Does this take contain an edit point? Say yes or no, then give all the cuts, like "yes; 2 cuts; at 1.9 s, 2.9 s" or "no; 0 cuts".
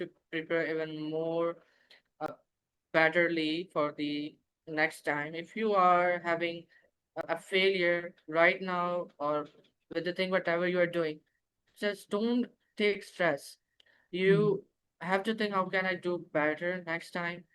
yes; 2 cuts; at 2.3 s, 7.2 s